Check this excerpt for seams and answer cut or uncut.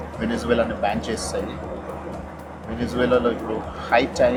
uncut